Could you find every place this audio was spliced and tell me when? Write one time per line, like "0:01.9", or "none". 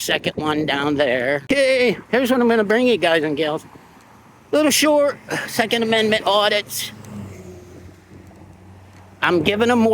0:01.4
0:06.1